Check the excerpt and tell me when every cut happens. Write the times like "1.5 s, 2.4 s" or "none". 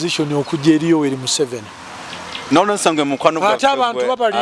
none